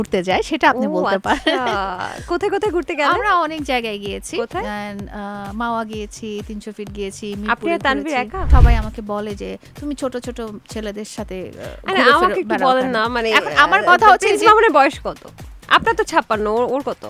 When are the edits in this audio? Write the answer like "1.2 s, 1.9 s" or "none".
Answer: 8.5 s